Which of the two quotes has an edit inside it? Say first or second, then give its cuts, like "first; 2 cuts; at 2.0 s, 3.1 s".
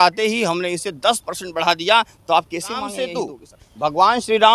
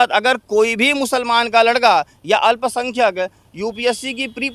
first; 1 cut; at 3.1 s